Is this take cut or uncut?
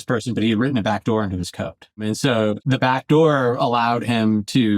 cut